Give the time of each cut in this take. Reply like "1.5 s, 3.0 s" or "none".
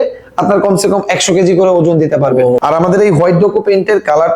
2.6 s